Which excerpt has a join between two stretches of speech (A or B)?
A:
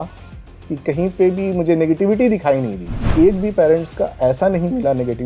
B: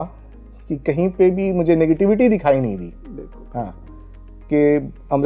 A